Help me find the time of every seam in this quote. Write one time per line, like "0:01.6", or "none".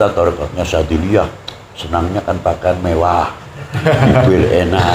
none